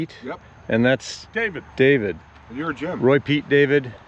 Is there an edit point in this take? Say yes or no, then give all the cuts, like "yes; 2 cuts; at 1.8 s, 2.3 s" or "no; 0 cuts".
no; 0 cuts